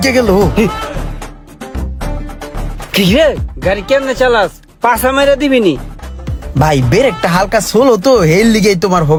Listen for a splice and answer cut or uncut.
uncut